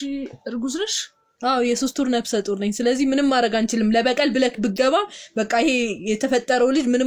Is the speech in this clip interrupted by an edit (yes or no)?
no